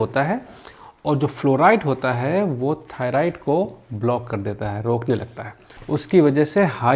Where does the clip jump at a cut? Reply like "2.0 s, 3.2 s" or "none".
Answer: none